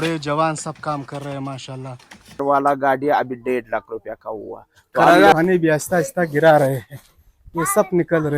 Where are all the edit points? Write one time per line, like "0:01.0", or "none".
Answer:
0:02.4
0:05.3